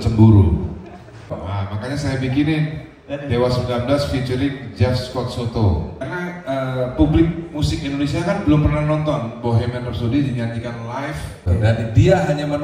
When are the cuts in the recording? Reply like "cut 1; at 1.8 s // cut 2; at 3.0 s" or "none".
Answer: cut 1; at 1.3 s // cut 2; at 6.0 s // cut 3; at 11.5 s

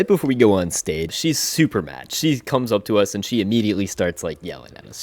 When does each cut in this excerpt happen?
cut 1; at 1.1 s

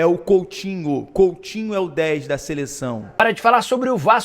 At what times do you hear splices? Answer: cut 1; at 3.2 s

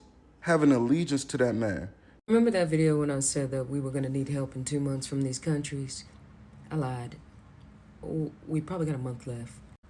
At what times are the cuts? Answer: cut 1; at 2.2 s

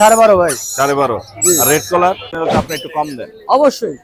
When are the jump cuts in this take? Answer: cut 1; at 2.3 s

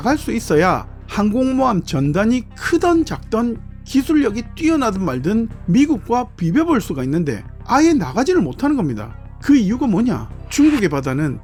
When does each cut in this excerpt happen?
none

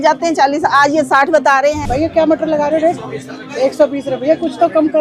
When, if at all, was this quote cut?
cut 1; at 1.8 s

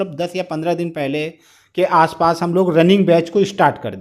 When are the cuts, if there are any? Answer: none

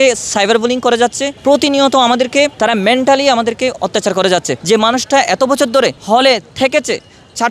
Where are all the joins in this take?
cut 1; at 1.3 s // cut 2; at 2.5 s // cut 3; at 4.5 s // cut 4; at 6.0 s

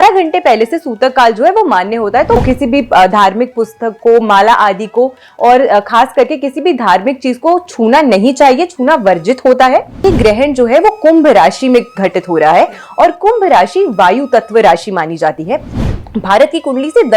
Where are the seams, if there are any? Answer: cut 1; at 2.4 s // cut 2; at 10.0 s // cut 3; at 15.8 s

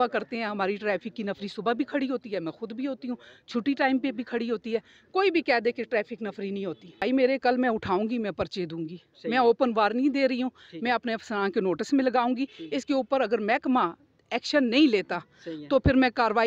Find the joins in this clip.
cut 1; at 7.0 s

